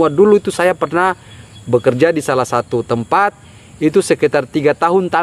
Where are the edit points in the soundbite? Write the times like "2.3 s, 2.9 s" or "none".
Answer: none